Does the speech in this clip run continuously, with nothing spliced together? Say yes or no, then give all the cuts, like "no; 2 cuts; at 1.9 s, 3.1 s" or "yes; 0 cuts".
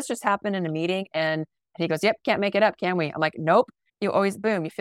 no; 2 cuts; at 1.6 s, 3.8 s